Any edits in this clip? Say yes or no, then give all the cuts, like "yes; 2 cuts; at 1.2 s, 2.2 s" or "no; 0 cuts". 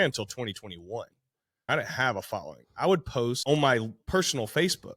yes; 2 cuts; at 1.7 s, 3.4 s